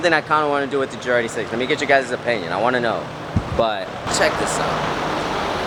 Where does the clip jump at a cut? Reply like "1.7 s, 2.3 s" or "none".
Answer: none